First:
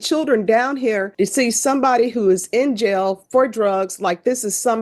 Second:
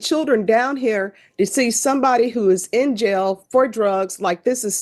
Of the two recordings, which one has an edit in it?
first; 1 cut; at 1.1 s

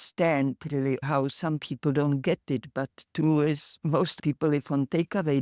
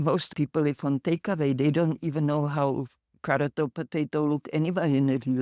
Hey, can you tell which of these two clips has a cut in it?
first; 1 cut; at 1.0 s

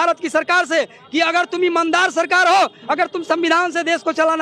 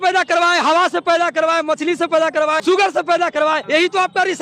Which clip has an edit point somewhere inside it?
second; 2 cuts; at 2.6 s, 3.6 s

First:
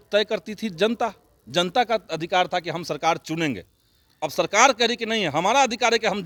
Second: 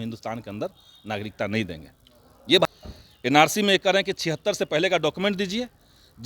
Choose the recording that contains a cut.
second; 1 cut; at 2.7 s

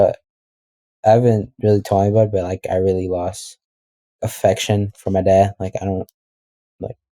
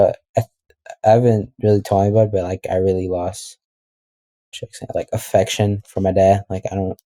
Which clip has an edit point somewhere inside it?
first; 1 cut; at 4.2 s

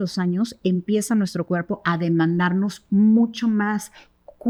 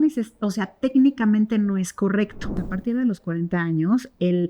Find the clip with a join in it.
second; 1 cut; at 2.5 s

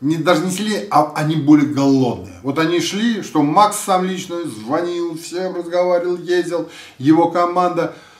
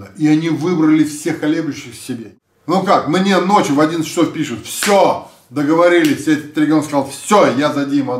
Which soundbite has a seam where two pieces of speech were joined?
second; 1 cut; at 2.3 s

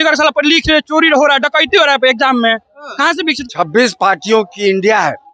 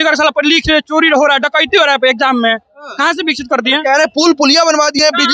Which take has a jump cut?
first; 1 cut; at 3.4 s

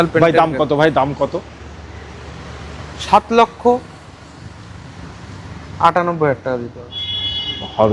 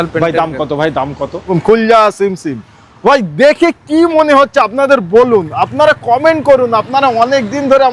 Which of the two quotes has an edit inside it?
second; 1 cut; at 1.5 s

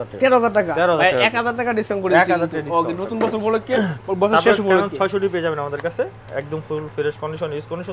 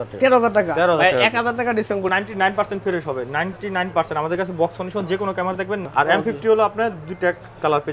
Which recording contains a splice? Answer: second; 2 cuts; at 2.1 s, 5.9 s

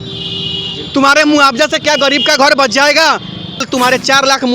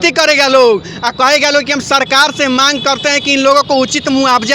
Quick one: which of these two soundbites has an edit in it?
first; 1 cut; at 3.6 s

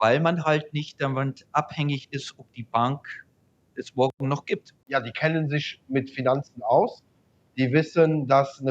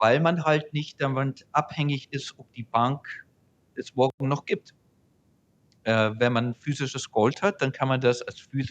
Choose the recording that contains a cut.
first; 1 cut; at 4.8 s

